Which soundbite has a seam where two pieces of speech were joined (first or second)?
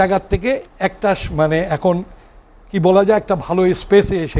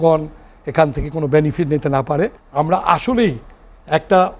second